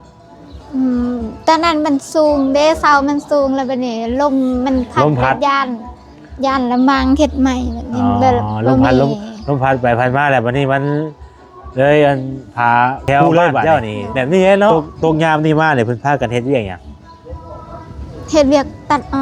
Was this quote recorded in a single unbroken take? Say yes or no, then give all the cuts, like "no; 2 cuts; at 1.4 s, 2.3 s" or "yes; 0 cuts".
no; 1 cut; at 14.7 s